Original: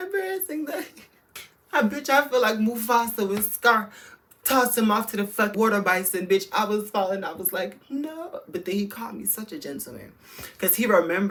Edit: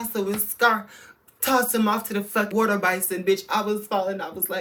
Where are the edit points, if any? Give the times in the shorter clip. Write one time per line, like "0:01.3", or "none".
none